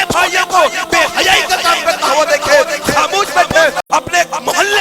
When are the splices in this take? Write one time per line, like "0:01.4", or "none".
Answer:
none